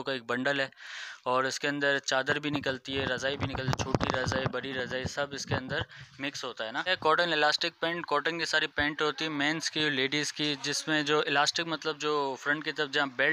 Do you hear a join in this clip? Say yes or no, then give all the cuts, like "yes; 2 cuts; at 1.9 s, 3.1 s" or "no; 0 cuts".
yes; 1 cut; at 6.9 s